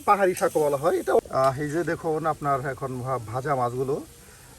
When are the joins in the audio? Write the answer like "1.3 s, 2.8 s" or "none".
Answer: 1.2 s